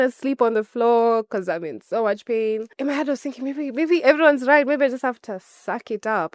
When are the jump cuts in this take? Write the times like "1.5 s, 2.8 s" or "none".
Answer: 2.7 s